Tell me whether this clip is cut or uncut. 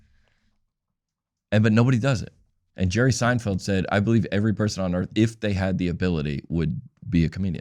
uncut